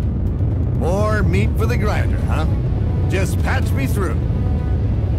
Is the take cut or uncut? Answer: uncut